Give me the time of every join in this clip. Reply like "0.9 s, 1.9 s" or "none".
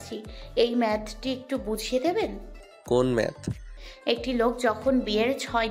3.7 s